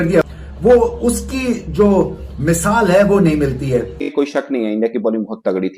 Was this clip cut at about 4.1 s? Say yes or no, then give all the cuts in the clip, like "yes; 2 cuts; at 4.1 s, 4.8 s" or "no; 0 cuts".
yes; 1 cut; at 4.1 s